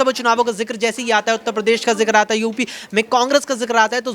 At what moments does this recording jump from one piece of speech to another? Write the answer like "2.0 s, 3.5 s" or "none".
none